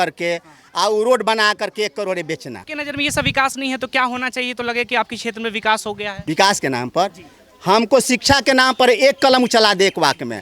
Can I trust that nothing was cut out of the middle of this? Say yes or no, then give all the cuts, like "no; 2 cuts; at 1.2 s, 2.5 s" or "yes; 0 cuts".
no; 2 cuts; at 2.7 s, 6.2 s